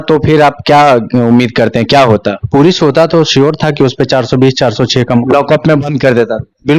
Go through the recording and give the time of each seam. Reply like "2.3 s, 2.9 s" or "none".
none